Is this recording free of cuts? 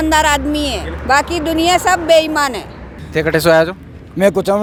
yes; 0 cuts

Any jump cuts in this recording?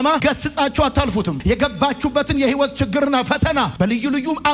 yes; 1 cut; at 1.4 s

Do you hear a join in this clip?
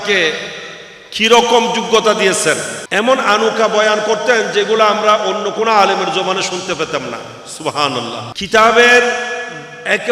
yes; 2 cuts; at 2.8 s, 8.3 s

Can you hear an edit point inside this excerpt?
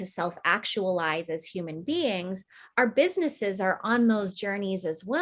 no; 0 cuts

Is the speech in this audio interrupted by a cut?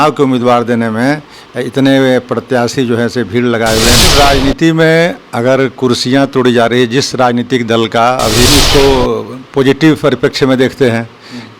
yes; 2 cuts; at 4.0 s, 8.5 s

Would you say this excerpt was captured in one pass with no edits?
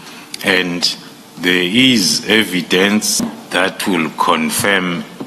no; 1 cut; at 3.4 s

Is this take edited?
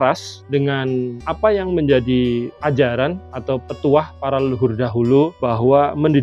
yes; 2 cuts; at 1.2 s, 5.4 s

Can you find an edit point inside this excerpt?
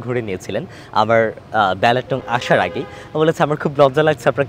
no; 0 cuts

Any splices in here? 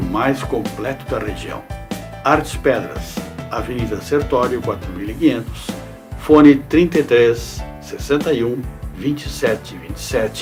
no; 0 cuts

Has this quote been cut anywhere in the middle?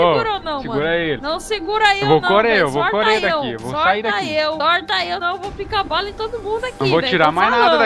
yes; 2 cuts; at 1.2 s, 5.0 s

